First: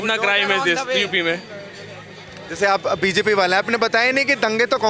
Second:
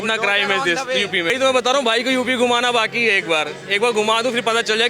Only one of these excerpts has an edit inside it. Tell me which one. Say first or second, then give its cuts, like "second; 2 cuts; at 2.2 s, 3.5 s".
second; 1 cut; at 1.3 s